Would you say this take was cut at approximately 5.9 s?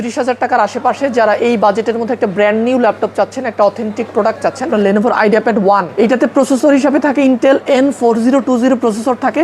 yes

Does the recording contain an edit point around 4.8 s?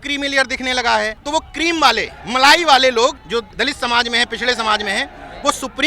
no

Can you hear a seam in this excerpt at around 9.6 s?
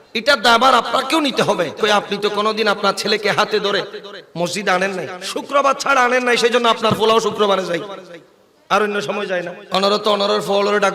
yes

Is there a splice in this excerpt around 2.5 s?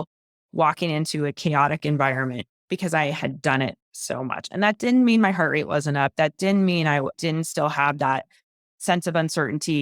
yes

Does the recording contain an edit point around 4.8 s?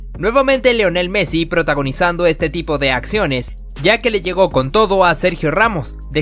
no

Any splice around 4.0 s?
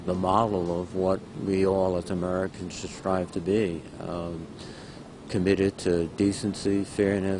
no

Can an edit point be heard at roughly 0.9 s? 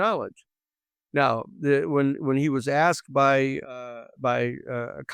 no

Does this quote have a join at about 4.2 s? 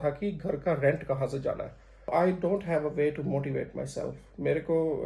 no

